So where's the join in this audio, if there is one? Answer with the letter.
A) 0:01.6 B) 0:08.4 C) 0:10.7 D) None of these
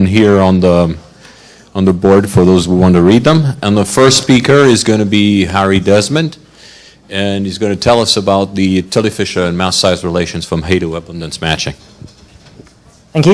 C